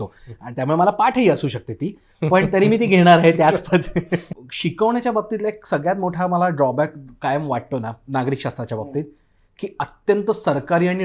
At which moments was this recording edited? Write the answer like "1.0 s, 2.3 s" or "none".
4.4 s